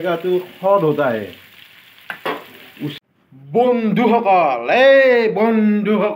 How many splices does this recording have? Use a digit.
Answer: 1